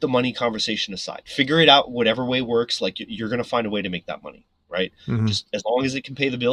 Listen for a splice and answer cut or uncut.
uncut